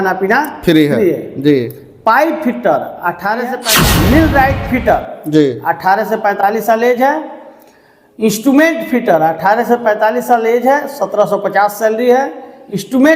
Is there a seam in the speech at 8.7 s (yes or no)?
no